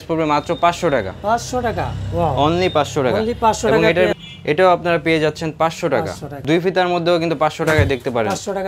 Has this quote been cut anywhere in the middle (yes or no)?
yes